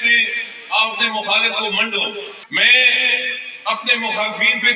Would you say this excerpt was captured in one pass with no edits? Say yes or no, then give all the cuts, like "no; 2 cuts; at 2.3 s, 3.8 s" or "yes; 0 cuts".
no; 1 cut; at 2.4 s